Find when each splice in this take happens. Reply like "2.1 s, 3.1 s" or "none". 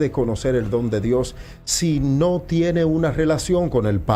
none

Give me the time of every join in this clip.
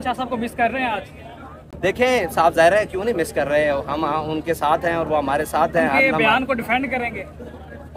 none

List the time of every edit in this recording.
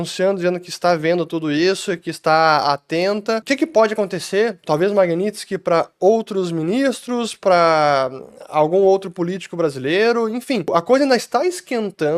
3.4 s, 10.7 s

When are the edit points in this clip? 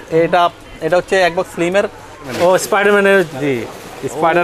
2.3 s

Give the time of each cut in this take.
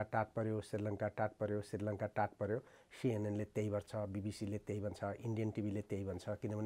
none

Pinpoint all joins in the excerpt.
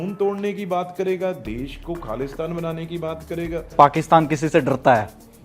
3.7 s

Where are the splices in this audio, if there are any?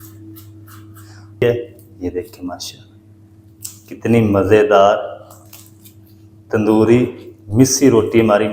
1.4 s

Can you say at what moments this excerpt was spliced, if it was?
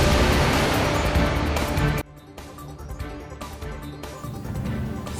1.9 s

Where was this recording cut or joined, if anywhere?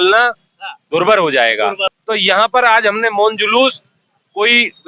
1.9 s

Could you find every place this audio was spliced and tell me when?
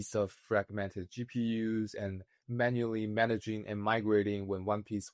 2.4 s

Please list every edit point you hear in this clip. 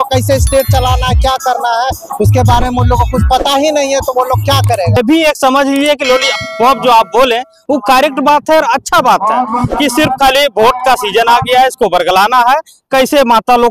5.0 s

